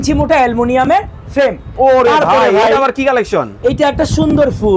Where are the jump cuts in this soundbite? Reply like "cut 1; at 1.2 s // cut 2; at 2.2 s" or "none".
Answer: cut 1; at 1.7 s